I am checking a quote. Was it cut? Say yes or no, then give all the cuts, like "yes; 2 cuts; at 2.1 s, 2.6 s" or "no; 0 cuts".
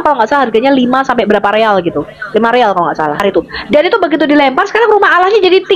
yes; 1 cut; at 3.2 s